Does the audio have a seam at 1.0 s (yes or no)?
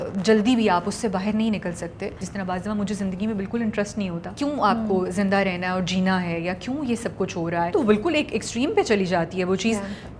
no